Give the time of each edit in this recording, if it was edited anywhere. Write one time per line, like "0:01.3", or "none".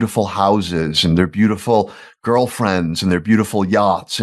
none